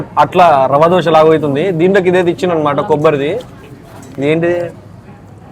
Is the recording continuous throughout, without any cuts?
yes; 0 cuts

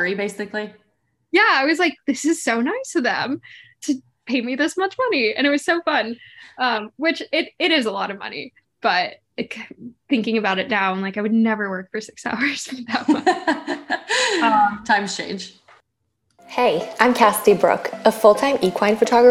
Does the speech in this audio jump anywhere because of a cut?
yes; 1 cut; at 16.1 s

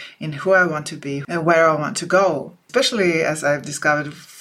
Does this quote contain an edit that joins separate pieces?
yes; 2 cuts; at 1.2 s, 2.6 s

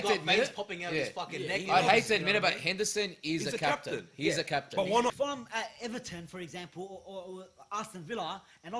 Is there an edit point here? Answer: yes; 1 cut; at 5.1 s

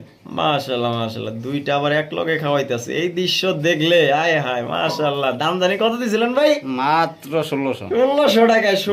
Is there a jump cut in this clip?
no; 0 cuts

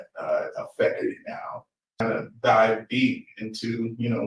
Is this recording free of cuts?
no; 1 cut; at 2.0 s

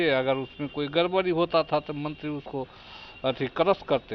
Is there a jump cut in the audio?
no; 0 cuts

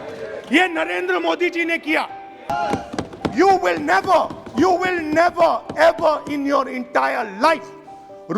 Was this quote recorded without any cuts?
no; 1 cut; at 2.5 s

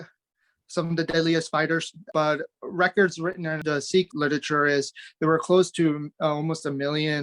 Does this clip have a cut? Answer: yes; 2 cuts; at 2.0 s, 3.9 s

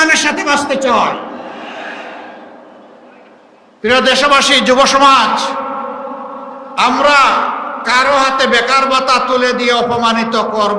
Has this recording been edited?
no; 0 cuts

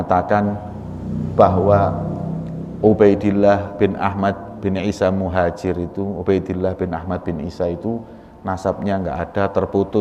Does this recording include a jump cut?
no; 0 cuts

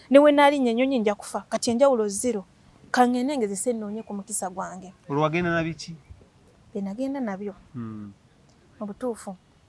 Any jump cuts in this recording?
no; 0 cuts

